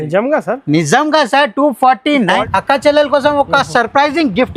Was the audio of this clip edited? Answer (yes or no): yes